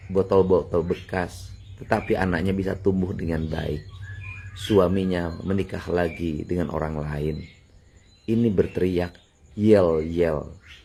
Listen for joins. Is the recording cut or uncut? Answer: uncut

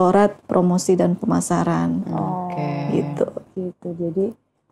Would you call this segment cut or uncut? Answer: uncut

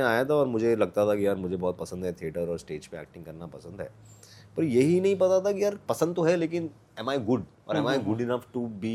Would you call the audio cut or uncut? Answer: uncut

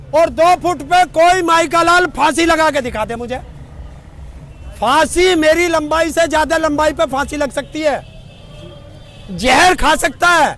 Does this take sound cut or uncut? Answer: uncut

